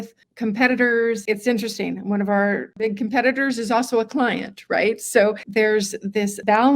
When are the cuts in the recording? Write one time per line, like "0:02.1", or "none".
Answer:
0:01.2

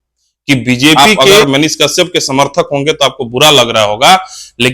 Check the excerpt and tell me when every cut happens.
0:01.4

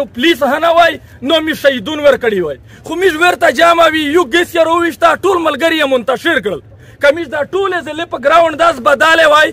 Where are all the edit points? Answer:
none

